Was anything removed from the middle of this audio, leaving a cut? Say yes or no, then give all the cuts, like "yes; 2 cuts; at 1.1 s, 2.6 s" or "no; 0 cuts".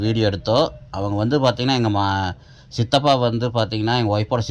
no; 0 cuts